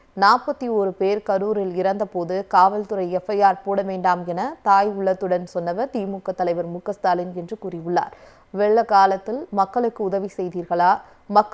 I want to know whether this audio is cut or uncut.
uncut